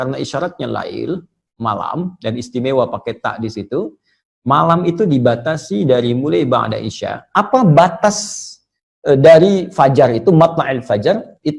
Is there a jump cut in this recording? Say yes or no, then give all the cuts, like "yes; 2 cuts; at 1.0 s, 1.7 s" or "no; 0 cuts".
yes; 1 cut; at 7.1 s